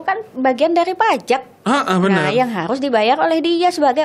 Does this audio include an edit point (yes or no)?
no